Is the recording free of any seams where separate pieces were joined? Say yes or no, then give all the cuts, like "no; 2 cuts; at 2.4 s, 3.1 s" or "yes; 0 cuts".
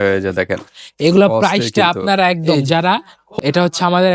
no; 1 cut; at 3.2 s